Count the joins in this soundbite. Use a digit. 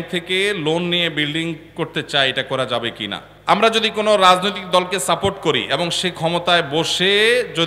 2